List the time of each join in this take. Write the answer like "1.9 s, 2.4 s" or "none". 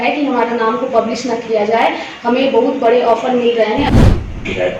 3.9 s